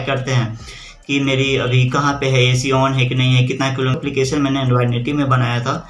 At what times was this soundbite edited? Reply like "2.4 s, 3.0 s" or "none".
4.0 s